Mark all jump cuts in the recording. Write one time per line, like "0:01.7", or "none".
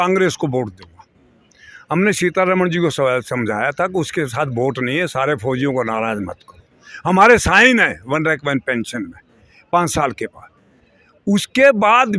none